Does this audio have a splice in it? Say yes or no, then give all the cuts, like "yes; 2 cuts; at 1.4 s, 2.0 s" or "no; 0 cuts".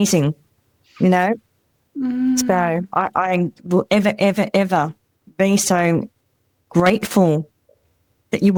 no; 0 cuts